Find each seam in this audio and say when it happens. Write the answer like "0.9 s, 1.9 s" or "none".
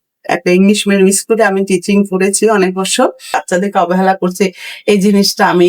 3.4 s